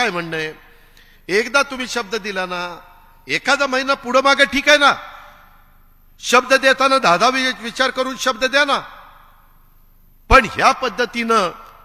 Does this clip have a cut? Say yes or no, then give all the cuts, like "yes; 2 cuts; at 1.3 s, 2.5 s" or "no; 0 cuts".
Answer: no; 0 cuts